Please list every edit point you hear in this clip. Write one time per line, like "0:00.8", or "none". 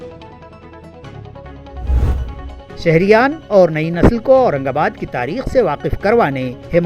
0:02.1